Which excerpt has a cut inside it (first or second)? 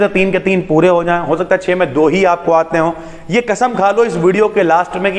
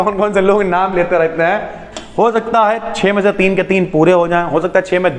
second